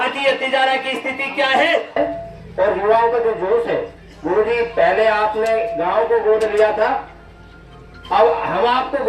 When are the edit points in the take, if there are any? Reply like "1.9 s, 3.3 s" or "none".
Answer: 2.0 s